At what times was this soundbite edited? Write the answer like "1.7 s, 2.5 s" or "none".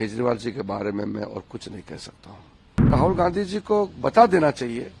2.9 s